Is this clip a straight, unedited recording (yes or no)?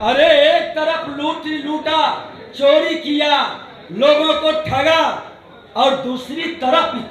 yes